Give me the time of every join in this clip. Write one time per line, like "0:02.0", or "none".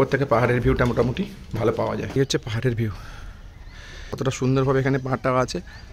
0:02.1
0:04.2